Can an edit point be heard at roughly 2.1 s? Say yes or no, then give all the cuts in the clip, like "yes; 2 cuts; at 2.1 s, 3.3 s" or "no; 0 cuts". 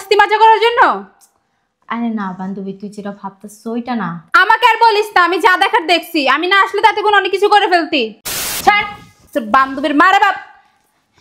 no; 1 cut; at 8.6 s